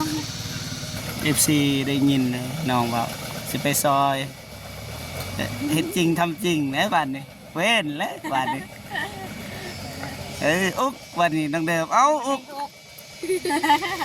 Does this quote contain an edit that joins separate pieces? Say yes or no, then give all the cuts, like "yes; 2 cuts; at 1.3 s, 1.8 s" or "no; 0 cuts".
yes; 1 cut; at 1.0 s